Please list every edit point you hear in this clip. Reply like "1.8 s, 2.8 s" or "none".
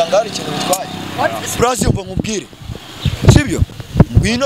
1.5 s